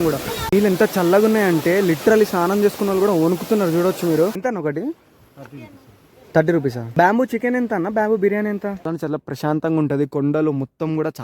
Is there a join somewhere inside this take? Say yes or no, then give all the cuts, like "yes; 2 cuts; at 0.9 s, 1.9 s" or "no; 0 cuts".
yes; 2 cuts; at 4.4 s, 8.9 s